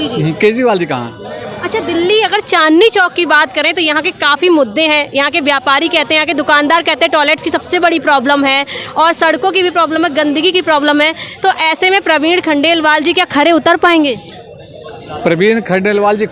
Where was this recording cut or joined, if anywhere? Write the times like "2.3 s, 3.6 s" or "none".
none